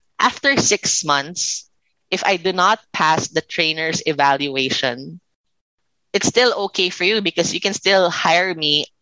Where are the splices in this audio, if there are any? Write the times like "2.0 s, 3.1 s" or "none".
none